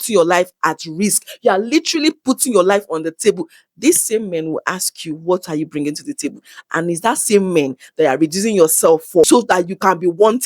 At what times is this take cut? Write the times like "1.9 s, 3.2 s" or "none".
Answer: 9.3 s